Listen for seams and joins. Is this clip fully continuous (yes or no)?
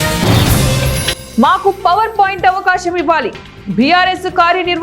no